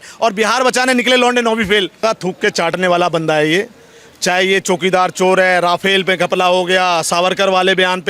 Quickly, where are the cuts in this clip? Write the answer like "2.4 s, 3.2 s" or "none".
2.0 s